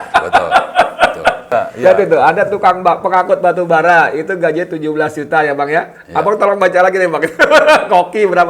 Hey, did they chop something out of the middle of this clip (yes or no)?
yes